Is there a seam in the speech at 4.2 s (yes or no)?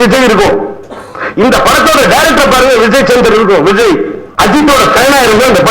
yes